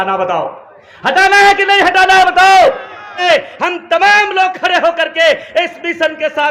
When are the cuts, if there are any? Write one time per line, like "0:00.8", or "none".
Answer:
0:03.2